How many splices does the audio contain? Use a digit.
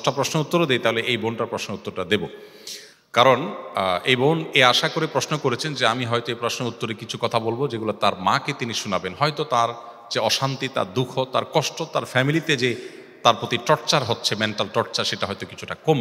0